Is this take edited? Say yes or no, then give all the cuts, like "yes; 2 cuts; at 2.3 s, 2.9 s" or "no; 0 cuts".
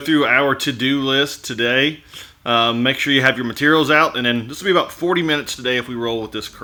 no; 0 cuts